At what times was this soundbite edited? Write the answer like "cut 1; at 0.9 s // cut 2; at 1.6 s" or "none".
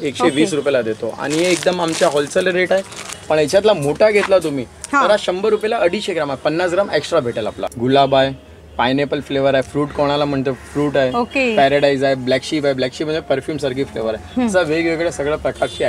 cut 1; at 3.0 s // cut 2; at 7.6 s